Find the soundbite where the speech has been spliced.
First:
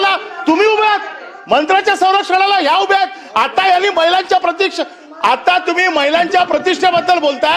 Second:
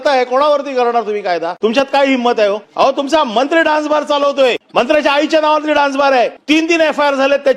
second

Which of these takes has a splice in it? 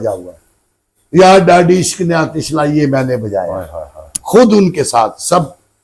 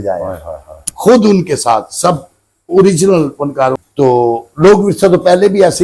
second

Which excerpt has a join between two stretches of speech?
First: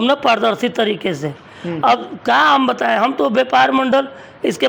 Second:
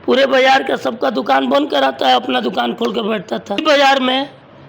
second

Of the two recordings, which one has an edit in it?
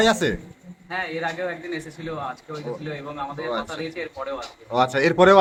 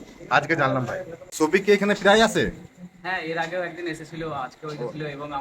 second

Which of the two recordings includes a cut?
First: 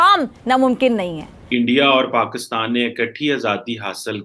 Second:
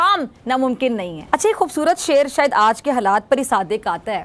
first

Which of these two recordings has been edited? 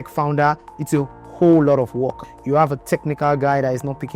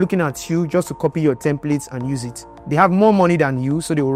first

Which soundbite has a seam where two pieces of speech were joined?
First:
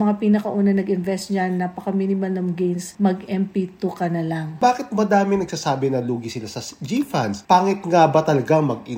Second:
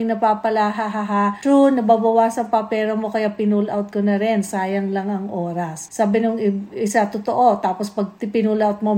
first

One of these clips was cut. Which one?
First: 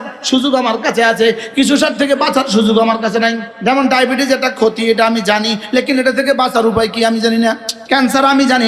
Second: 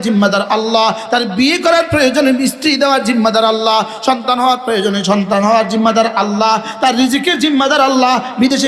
first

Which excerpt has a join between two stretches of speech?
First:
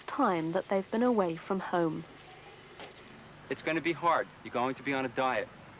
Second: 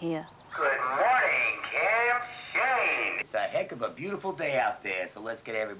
second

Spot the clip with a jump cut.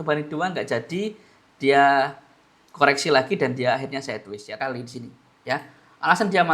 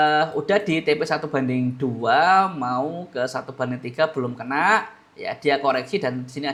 first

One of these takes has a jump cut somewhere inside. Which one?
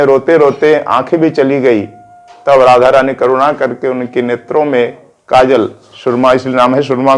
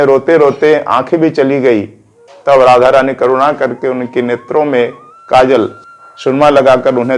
second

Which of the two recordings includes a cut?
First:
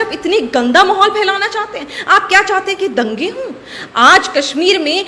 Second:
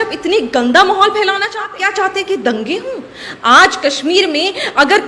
second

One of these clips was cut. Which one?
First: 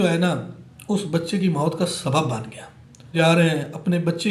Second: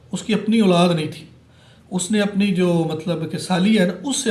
first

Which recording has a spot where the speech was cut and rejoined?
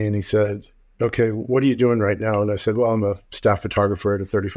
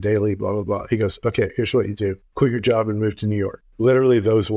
second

